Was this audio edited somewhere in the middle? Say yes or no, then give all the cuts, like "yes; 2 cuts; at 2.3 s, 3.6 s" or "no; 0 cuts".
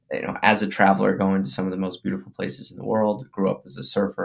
no; 0 cuts